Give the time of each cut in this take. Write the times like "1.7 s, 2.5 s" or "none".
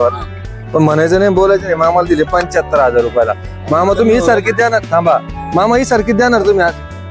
none